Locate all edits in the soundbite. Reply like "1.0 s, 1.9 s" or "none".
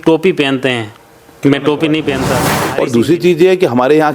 2.4 s